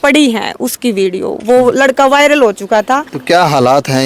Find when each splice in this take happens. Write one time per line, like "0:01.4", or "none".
0:03.1